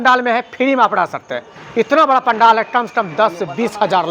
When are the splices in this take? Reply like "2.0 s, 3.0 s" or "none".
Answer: none